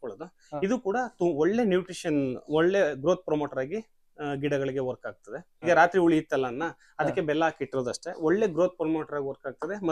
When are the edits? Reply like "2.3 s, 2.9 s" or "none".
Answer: 5.6 s